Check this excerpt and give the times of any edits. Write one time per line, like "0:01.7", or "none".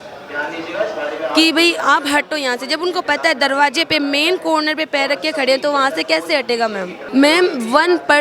0:06.9